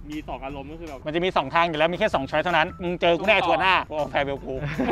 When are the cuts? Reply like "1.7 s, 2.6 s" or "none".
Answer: 1.0 s

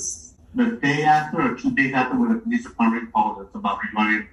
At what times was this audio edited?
none

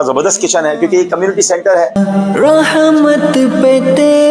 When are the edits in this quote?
2.0 s

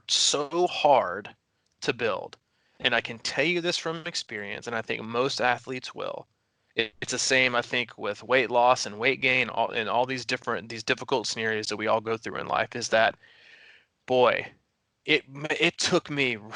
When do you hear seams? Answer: none

